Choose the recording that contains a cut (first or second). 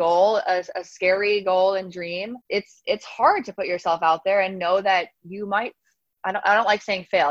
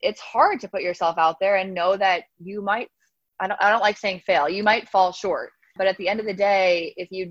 second